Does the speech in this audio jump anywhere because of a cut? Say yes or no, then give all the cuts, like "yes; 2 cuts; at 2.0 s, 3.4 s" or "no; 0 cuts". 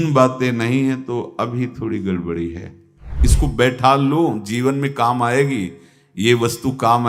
yes; 1 cut; at 3.2 s